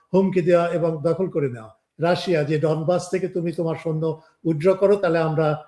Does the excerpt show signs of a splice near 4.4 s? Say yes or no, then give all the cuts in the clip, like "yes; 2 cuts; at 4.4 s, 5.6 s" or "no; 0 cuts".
no; 1 cut; at 1.8 s